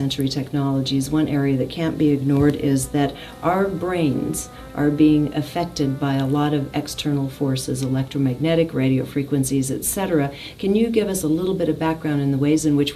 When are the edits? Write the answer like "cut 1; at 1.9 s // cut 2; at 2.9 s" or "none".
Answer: cut 1; at 6.3 s